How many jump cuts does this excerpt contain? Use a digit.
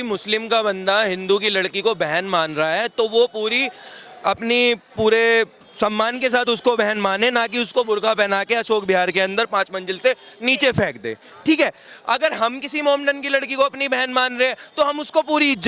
0